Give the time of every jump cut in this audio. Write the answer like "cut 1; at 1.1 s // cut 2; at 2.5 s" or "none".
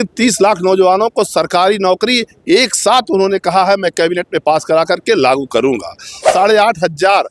cut 1; at 6.3 s